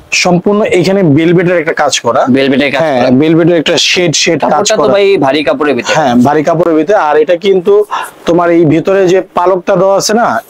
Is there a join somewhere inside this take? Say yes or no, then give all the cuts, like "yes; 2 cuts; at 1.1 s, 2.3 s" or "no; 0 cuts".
no; 0 cuts